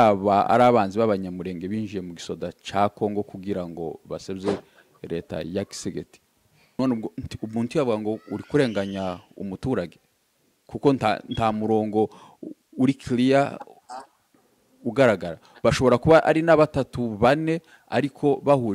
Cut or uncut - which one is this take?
cut